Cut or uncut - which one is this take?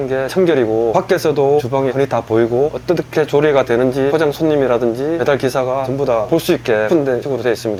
uncut